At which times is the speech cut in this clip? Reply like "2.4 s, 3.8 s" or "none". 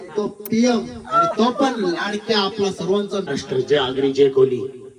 3.3 s